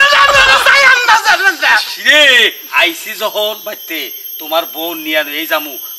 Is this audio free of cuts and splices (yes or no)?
yes